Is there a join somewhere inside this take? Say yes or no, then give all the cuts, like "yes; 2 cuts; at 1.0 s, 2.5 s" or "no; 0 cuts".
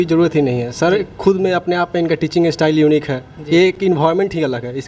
no; 0 cuts